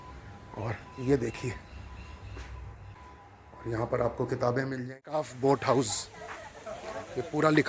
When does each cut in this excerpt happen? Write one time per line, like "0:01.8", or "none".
0:03.0
0:04.9